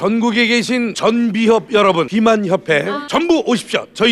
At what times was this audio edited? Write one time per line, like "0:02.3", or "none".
0:00.9
0:02.1
0:03.0